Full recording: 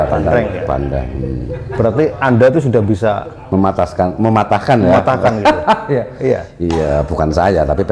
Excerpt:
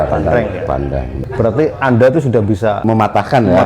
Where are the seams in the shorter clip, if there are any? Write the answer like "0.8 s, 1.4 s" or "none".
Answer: 1.2 s, 2.8 s